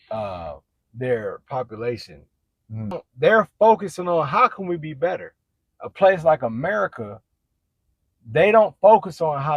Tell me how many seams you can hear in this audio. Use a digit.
1